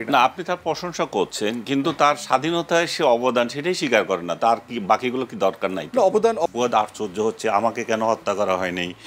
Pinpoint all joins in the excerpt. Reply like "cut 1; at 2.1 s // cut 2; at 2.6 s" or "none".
cut 1; at 6.5 s